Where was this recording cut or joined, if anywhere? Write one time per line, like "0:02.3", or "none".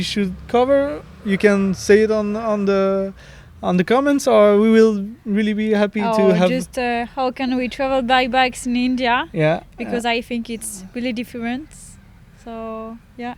none